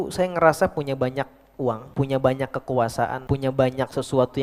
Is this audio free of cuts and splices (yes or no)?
no